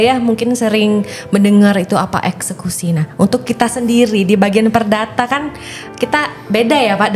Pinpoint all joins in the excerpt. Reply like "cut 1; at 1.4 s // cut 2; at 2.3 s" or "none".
none

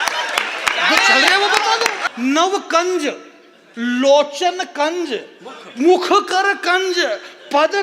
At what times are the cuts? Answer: cut 1; at 2.0 s

